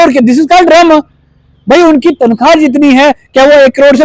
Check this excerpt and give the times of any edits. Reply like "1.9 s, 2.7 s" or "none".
none

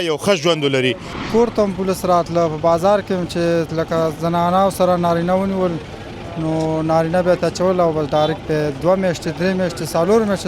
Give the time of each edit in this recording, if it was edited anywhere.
1.1 s

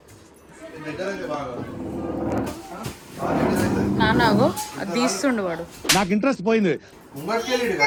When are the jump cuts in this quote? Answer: none

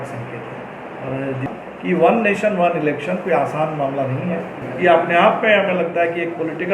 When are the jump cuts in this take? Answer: 1.5 s, 4.6 s

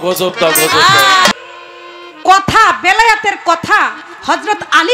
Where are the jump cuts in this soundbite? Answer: 1.3 s

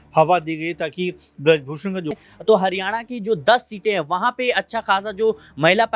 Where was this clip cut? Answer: 2.1 s

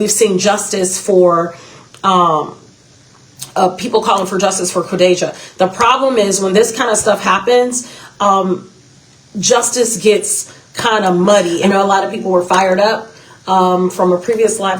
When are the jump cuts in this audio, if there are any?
11.6 s

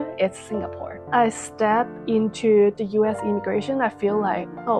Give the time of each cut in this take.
1.1 s, 2.8 s

